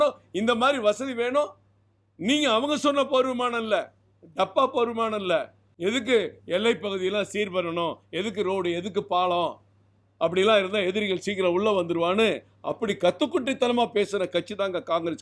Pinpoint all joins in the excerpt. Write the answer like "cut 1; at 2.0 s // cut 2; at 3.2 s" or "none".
cut 1; at 5.6 s